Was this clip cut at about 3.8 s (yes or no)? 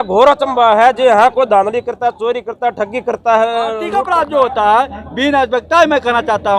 yes